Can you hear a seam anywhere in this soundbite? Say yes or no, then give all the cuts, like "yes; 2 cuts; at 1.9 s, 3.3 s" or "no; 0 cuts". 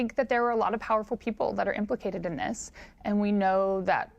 no; 0 cuts